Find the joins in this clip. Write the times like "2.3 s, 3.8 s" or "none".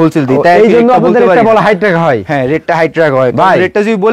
none